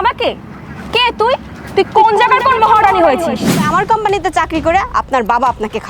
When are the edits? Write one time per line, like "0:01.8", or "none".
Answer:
0:03.6